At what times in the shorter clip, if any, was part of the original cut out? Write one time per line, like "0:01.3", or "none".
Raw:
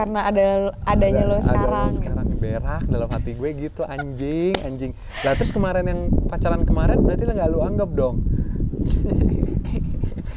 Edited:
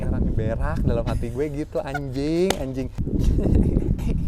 0:03.0